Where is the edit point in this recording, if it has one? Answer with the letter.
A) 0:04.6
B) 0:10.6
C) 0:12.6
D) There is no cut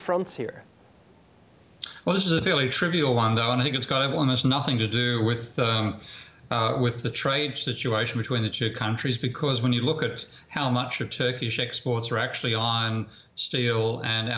B